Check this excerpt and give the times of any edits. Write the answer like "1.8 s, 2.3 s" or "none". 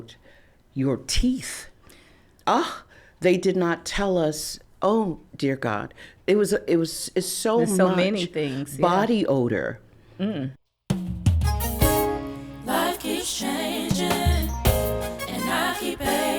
10.5 s

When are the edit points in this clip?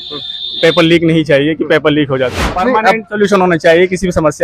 2.5 s

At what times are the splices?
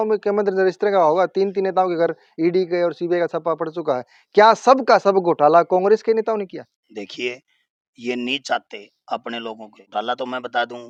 none

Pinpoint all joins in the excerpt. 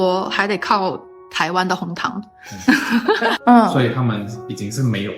3.4 s

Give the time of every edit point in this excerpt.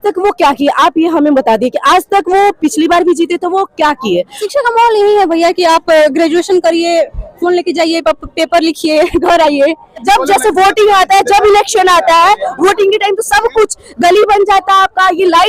4.4 s, 10.0 s

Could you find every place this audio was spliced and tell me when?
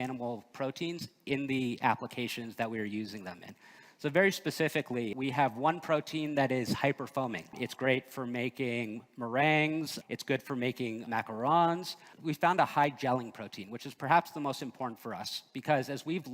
5.1 s, 7.6 s, 9.9 s, 11.0 s, 12.0 s

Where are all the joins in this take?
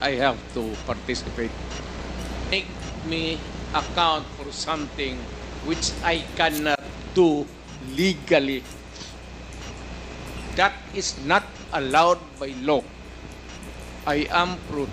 2.5 s

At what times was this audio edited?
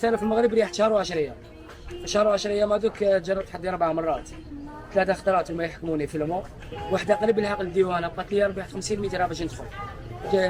none

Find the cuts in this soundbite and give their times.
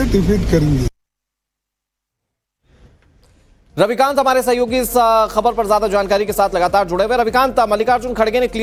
none

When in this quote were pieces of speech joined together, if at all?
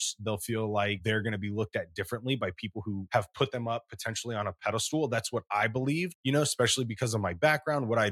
1.0 s, 3.0 s, 6.1 s

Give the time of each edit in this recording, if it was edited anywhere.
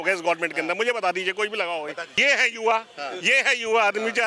2.1 s

